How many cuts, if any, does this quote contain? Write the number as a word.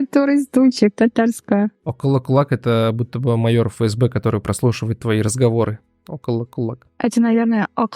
two